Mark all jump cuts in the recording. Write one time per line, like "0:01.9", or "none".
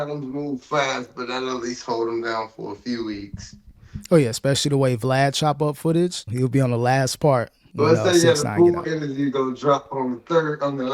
0:06.2
0:07.6